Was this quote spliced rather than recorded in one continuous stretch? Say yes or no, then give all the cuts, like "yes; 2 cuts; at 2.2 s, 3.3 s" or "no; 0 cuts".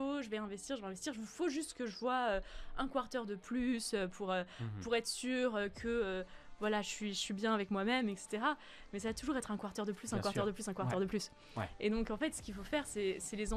no; 0 cuts